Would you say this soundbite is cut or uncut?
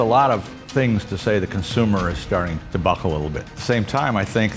cut